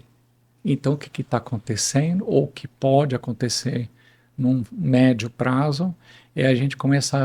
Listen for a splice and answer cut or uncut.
uncut